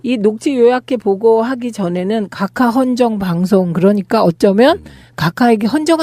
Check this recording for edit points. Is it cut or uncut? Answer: cut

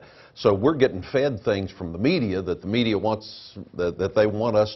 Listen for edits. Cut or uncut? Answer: cut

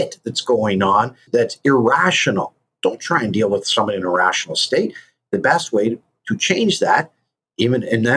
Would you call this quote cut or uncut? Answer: cut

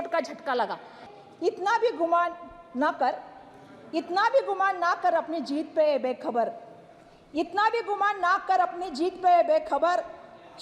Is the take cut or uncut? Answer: cut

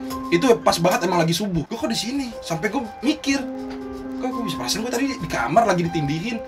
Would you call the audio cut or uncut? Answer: cut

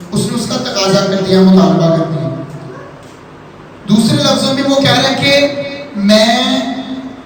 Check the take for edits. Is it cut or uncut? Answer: uncut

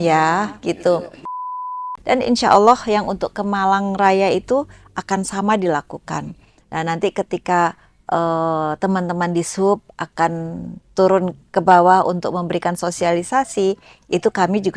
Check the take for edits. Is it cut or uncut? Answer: cut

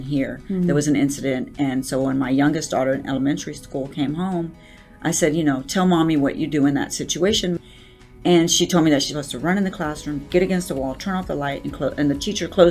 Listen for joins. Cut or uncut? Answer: cut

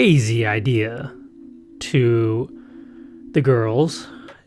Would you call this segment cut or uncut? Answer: uncut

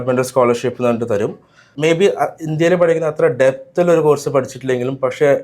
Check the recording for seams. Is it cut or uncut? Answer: cut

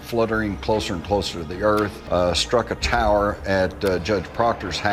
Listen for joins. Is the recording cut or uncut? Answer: cut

